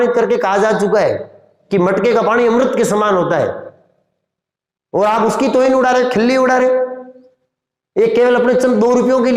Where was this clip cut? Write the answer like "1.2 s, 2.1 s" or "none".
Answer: none